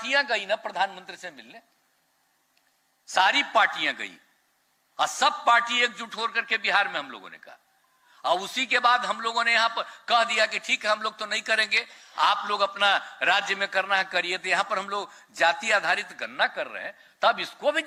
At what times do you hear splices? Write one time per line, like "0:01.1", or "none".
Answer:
none